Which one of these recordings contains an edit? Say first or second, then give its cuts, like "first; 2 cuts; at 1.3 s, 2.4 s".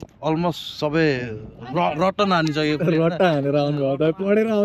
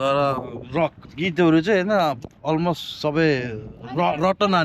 second; 1 cut; at 1.0 s